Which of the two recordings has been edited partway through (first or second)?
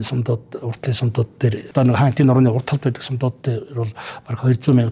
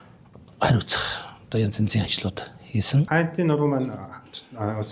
second